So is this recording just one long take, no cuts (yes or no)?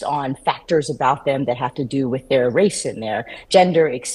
yes